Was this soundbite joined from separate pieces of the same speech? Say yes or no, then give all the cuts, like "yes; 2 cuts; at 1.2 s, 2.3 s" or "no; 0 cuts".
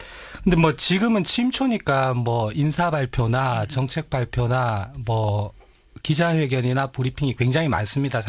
yes; 1 cut; at 3.1 s